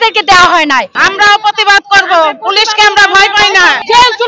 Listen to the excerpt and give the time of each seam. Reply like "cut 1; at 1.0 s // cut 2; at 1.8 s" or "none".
cut 1; at 0.9 s